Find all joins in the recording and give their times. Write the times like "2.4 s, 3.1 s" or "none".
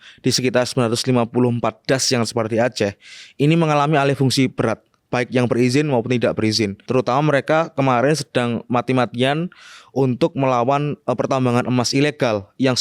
6.9 s